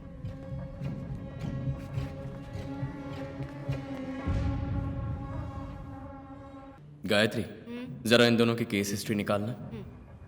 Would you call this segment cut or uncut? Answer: cut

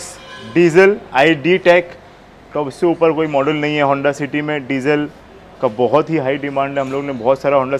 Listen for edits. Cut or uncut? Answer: uncut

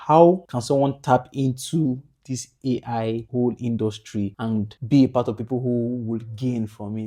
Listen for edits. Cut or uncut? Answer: uncut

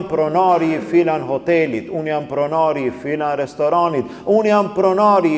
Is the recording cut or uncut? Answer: uncut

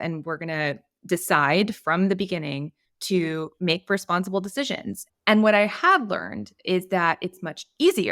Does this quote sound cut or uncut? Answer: cut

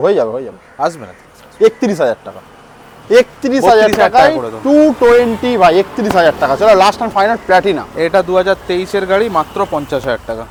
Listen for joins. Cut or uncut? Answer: uncut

